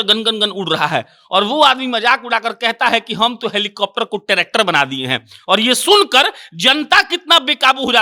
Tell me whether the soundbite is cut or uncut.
uncut